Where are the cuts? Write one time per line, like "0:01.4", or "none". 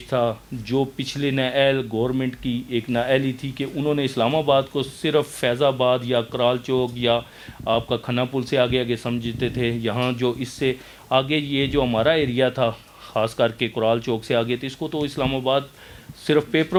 none